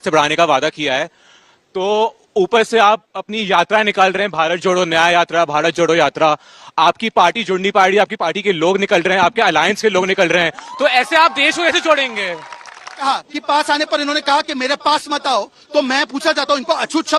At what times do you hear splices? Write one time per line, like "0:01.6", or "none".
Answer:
0:12.9